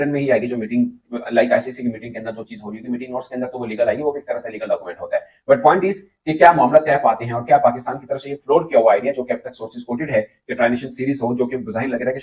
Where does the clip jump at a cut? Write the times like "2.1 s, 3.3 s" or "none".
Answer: none

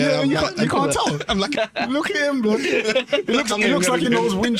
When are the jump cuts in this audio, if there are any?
1.5 s

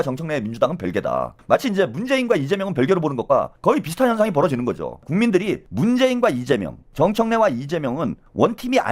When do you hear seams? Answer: 5.4 s, 6.8 s

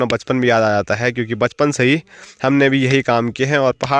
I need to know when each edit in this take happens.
none

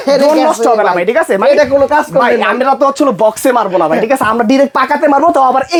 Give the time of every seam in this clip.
none

